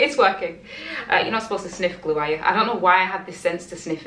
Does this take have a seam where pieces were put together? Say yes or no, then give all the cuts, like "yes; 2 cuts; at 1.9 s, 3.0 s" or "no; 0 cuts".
no; 0 cuts